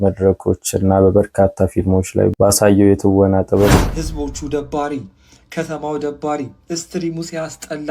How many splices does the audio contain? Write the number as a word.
one